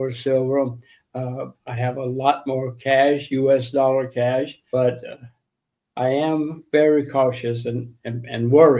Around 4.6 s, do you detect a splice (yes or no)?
yes